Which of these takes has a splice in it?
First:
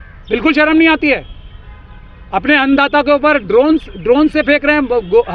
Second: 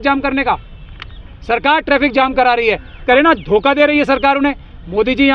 second; 1 cut; at 3.0 s

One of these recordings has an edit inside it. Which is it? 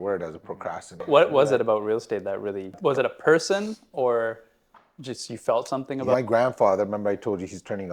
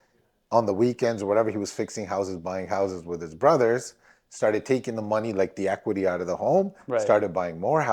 first; 3 cuts; at 1.1 s, 2.8 s, 6.1 s

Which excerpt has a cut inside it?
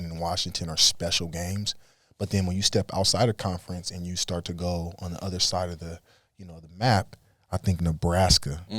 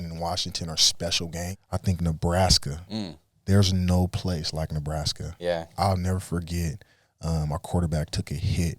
second; 1 cut; at 1.6 s

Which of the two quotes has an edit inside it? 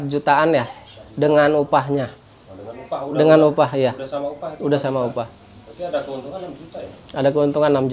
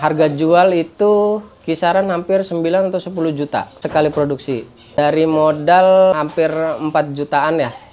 second; 3 cuts; at 3.7 s, 5.0 s, 6.1 s

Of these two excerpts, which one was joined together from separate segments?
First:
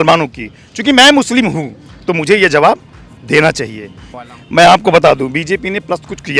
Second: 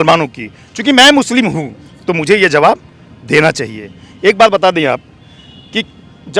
first; 1 cut; at 4.0 s

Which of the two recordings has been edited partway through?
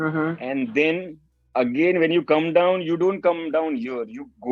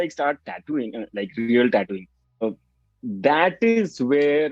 second; 1 cut; at 2.6 s

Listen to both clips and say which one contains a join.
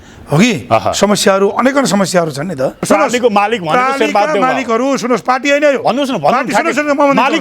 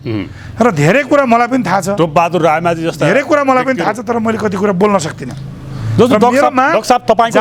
first; 1 cut; at 2.8 s

